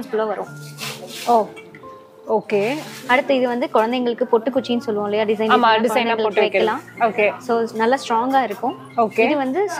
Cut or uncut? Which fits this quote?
uncut